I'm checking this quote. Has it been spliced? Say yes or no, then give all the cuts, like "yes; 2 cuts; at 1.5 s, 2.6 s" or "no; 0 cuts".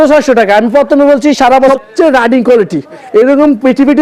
yes; 1 cut; at 1.7 s